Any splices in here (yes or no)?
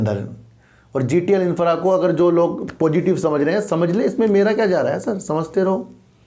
no